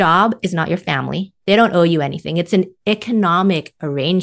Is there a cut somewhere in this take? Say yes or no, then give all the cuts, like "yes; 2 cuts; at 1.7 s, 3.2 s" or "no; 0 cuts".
yes; 1 cut; at 1.3 s